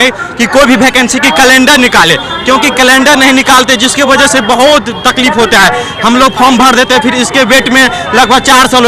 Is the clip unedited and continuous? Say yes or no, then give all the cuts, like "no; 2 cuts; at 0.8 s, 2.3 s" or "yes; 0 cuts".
yes; 0 cuts